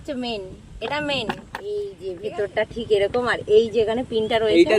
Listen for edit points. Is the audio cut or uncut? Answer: cut